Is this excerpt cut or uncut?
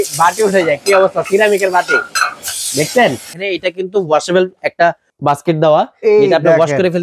cut